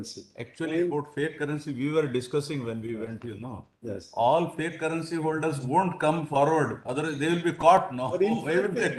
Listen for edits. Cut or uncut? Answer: uncut